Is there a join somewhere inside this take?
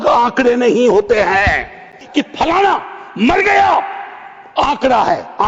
yes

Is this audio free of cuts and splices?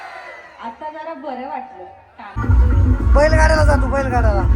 no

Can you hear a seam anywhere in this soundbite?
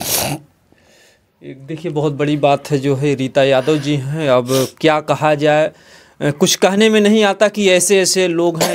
no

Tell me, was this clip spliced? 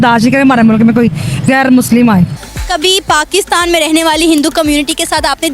yes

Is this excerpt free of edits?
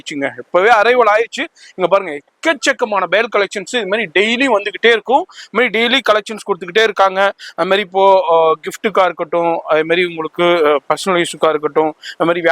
yes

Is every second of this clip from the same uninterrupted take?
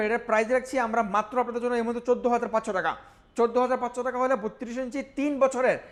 yes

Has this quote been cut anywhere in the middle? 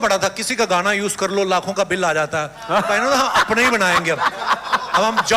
no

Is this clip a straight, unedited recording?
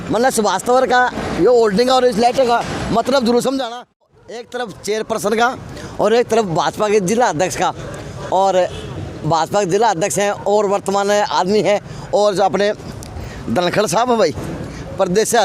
no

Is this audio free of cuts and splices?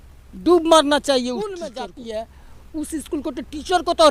no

